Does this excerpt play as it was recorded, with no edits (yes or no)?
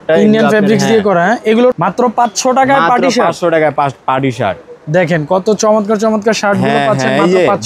no